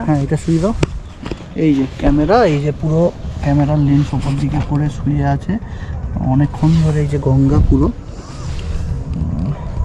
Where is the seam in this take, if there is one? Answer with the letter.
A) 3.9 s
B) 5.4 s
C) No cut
C